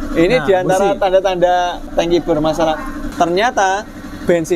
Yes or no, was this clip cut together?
yes